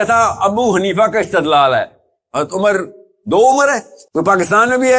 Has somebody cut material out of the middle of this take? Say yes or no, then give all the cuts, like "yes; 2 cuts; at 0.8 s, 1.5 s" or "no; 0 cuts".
no; 0 cuts